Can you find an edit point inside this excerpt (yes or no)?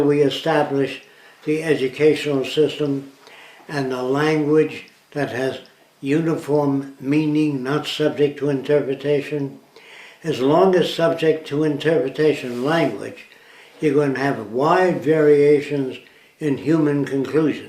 no